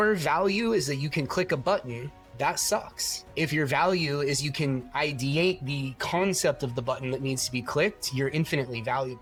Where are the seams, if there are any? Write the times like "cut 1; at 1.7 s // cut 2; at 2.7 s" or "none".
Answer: none